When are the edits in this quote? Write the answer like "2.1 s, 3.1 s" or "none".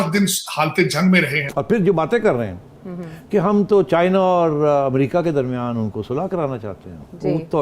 1.4 s